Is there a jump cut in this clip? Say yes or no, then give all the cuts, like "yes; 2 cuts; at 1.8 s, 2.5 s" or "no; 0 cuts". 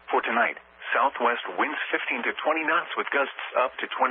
yes; 1 cut; at 1.7 s